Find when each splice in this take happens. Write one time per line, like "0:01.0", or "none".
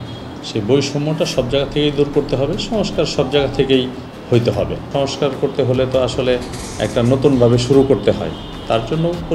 none